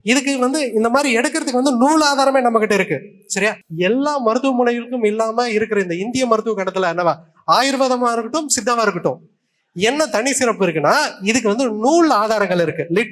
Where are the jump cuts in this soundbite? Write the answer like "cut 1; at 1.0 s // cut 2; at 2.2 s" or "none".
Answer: cut 1; at 3.6 s